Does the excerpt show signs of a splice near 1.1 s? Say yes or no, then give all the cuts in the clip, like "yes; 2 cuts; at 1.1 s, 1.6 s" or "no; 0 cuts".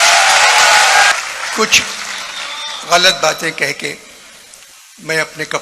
yes; 1 cut; at 1.1 s